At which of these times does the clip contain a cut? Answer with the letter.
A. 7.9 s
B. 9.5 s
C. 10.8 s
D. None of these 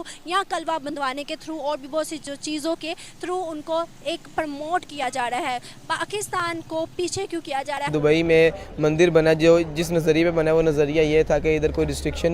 A